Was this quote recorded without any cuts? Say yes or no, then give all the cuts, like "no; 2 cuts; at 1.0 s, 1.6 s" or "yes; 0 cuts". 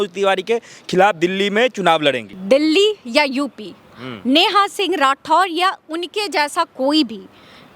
no; 1 cut; at 2.3 s